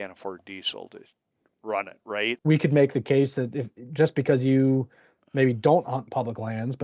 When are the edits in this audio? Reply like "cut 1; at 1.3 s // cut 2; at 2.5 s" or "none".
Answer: cut 1; at 2.3 s